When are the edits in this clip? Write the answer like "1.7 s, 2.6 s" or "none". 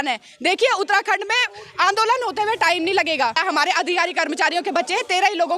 3.4 s